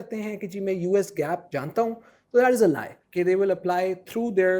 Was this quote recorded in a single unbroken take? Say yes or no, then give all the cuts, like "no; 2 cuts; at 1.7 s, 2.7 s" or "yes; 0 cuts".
no; 2 cuts; at 1.5 s, 3.0 s